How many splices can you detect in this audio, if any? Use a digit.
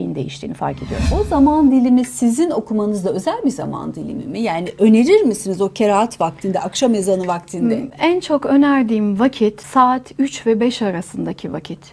2